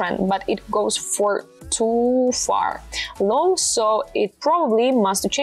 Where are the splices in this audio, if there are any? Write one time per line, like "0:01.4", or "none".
none